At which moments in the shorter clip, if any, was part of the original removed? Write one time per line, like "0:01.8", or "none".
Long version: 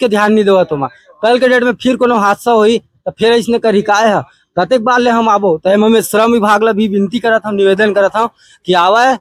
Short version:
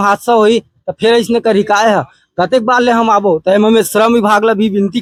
none